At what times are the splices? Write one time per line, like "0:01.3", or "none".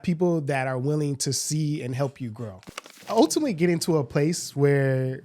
0:03.0